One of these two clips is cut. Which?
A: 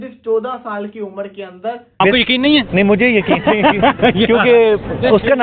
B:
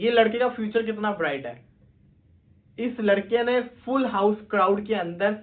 A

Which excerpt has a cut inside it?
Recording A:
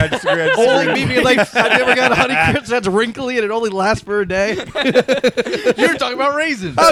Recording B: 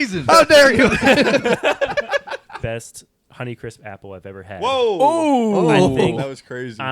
B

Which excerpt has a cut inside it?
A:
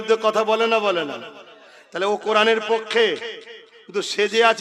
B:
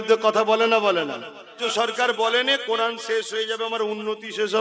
B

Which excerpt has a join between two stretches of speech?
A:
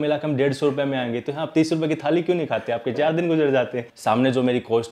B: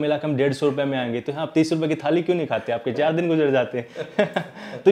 A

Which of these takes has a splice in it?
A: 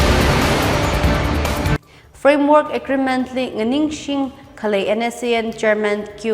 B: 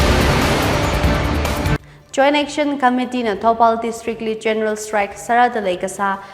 B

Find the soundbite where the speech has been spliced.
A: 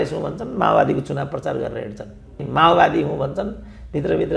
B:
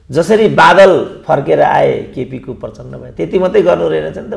A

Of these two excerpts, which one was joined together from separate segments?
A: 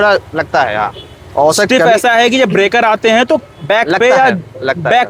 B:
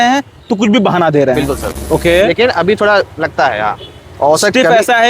B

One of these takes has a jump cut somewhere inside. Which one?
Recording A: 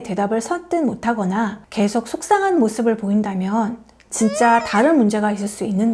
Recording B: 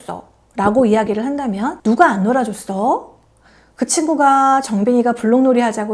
B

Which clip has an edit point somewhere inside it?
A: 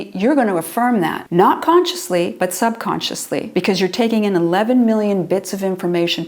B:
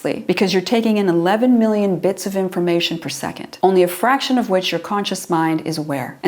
A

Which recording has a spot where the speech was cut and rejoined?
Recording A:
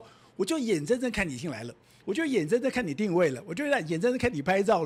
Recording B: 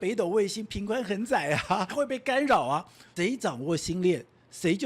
B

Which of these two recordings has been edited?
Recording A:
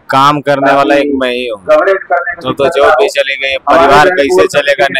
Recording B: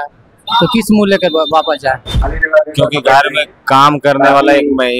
B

